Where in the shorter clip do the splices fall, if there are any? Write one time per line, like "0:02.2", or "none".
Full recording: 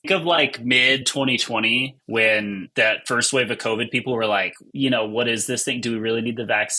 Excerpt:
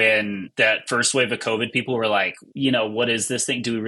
none